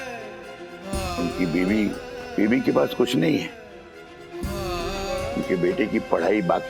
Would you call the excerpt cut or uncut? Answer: uncut